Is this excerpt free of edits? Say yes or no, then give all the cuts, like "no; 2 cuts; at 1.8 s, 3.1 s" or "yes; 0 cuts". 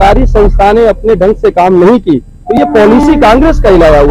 yes; 0 cuts